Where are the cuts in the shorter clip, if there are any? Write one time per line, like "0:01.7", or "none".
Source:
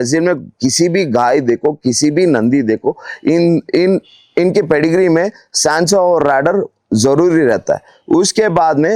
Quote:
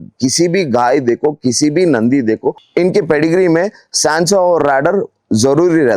0:02.6